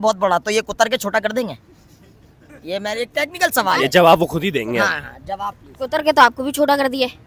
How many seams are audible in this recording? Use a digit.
0